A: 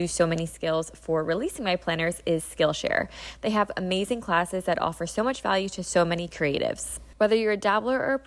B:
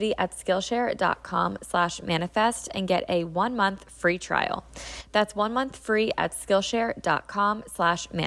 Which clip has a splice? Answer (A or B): A